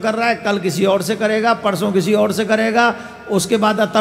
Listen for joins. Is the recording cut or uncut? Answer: uncut